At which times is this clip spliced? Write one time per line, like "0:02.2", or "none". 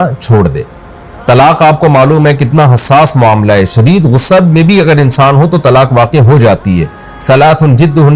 none